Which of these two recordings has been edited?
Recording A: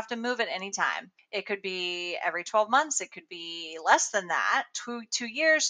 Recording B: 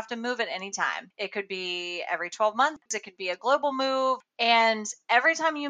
B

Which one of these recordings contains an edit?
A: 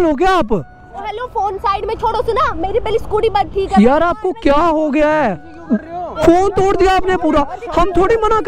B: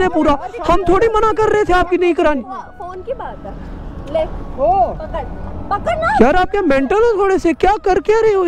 A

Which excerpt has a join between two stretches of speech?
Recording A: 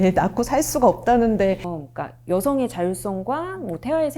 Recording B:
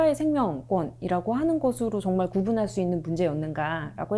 A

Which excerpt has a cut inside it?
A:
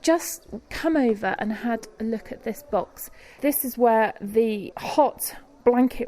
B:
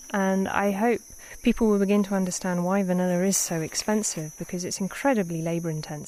A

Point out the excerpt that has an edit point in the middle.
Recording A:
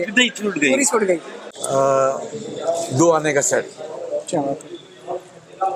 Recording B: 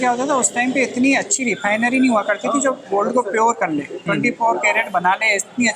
A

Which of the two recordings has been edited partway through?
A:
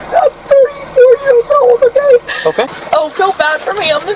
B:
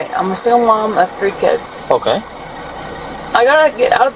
A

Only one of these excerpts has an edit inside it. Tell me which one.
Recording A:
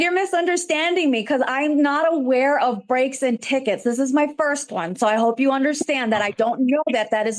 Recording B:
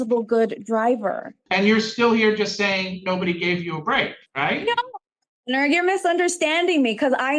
B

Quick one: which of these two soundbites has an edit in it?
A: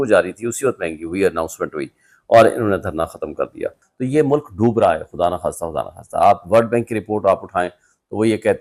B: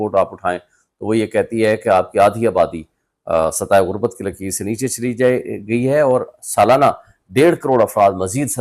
A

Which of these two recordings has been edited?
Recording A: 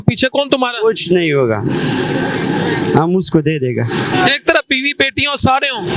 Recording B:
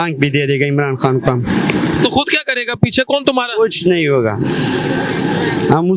A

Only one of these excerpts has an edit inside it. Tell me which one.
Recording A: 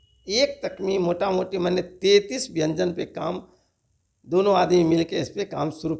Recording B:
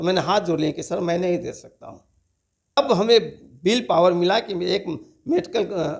B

